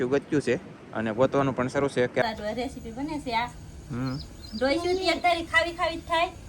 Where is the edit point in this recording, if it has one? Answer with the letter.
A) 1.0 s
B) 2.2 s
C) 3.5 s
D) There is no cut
B